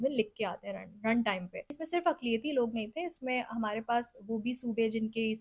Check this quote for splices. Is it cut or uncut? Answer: cut